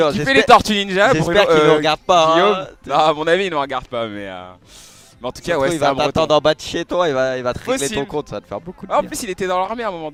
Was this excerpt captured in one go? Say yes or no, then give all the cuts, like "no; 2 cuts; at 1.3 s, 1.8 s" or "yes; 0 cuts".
yes; 0 cuts